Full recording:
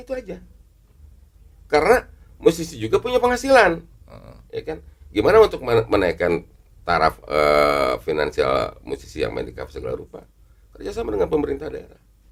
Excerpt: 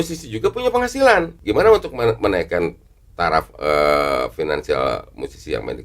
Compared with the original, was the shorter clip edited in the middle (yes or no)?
yes